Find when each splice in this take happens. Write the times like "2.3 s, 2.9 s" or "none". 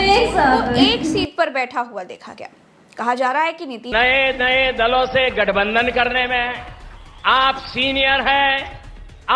3.8 s